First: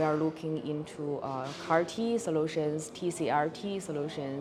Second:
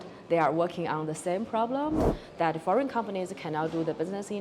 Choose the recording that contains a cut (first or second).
second